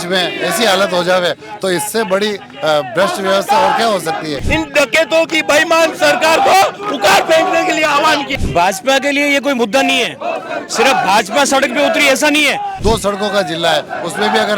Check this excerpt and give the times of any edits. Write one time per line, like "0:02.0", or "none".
0:04.4
0:08.3
0:12.7